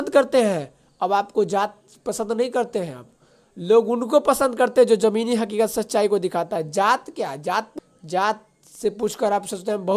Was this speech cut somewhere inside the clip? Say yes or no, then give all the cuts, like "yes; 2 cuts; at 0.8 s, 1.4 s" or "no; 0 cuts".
yes; 1 cut; at 7.7 s